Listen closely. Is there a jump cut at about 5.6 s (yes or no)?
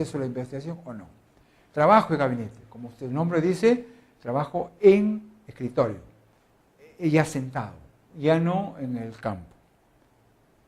no